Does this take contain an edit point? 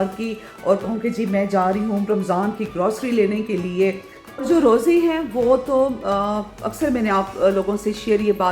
yes; 1 cut; at 3.7 s

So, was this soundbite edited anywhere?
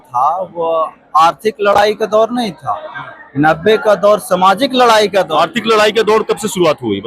no; 0 cuts

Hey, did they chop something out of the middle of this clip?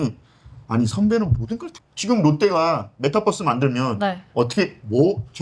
yes; 1 cut; at 1.8 s

